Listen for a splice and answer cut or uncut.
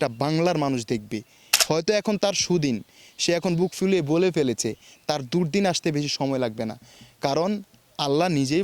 cut